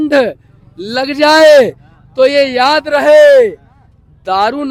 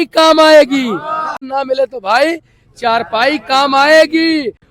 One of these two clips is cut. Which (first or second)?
second